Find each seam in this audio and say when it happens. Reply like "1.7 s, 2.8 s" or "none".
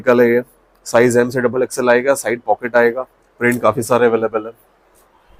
none